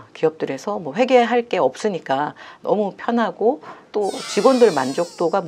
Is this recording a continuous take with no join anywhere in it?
yes; 0 cuts

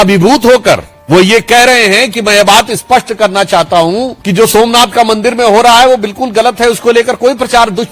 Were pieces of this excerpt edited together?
yes; 2 cuts; at 0.9 s, 4.2 s

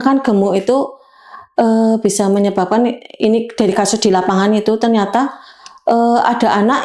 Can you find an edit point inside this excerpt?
no; 0 cuts

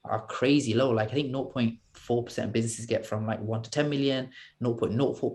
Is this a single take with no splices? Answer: yes; 0 cuts

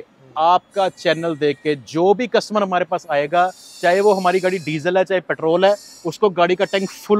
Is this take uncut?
yes; 0 cuts

